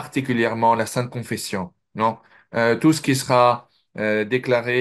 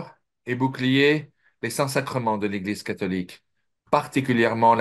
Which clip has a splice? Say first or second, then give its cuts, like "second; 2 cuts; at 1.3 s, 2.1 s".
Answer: first; 1 cut; at 1.8 s